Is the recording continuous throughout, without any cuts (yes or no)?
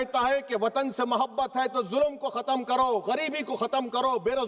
yes